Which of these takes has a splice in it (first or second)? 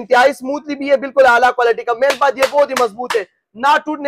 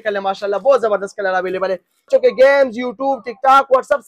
second